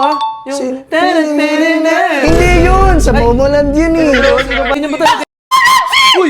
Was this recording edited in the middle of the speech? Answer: yes; 1 cut; at 4.7 s

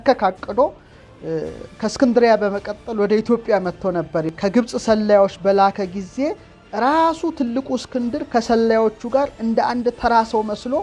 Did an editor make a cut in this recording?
yes; 1 cut; at 4.3 s

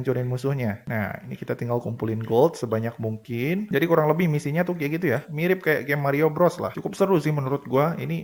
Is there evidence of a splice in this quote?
no; 0 cuts

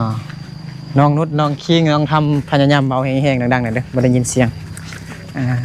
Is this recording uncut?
yes; 0 cuts

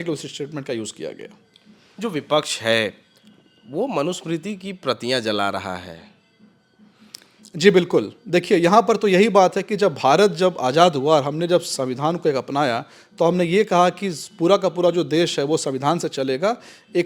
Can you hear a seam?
no; 0 cuts

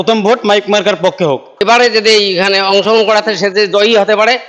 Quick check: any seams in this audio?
yes; 1 cut; at 1.6 s

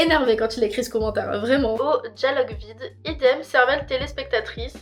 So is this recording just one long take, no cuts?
yes; 0 cuts

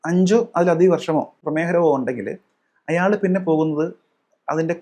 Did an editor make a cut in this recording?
yes; 1 cut; at 1.4 s

